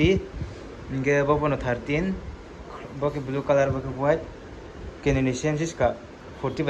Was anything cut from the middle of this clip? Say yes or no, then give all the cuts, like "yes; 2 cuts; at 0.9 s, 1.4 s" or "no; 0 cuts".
no; 0 cuts